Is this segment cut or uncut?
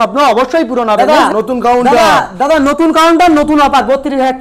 cut